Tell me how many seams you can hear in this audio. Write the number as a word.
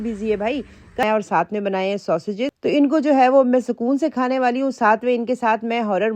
one